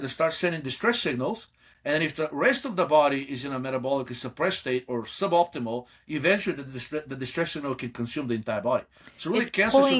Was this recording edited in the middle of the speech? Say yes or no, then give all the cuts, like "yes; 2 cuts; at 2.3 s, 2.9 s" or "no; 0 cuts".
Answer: no; 0 cuts